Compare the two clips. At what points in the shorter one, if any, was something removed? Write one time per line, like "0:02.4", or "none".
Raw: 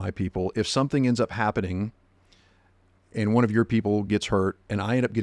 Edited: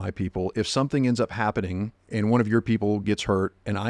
0:02.0